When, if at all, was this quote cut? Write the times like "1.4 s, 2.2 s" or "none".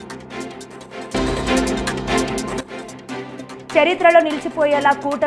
1.0 s, 3.6 s